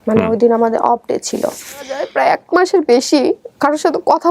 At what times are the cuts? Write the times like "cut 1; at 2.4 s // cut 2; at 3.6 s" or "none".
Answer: cut 1; at 2.1 s